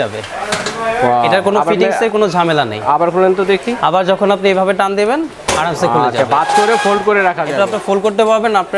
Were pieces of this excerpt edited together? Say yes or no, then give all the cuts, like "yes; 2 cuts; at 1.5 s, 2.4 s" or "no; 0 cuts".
no; 0 cuts